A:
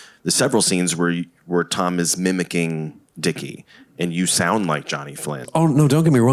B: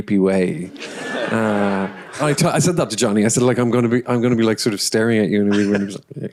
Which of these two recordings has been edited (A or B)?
A